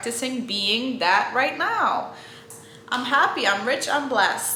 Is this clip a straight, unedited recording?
yes; 0 cuts

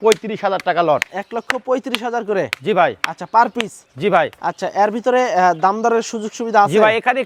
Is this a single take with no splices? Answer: yes; 0 cuts

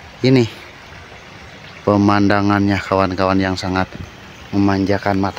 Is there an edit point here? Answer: no; 0 cuts

